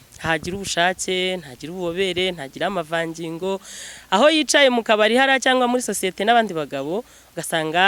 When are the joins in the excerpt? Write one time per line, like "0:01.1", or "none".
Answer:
none